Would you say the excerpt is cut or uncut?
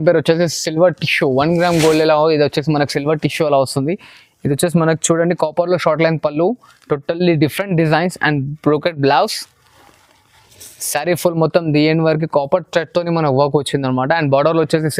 uncut